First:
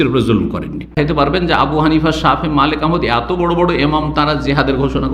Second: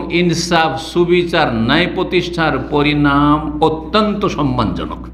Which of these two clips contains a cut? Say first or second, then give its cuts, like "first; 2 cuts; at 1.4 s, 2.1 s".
first; 1 cut; at 0.9 s